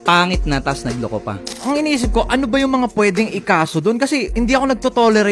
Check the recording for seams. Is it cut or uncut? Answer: cut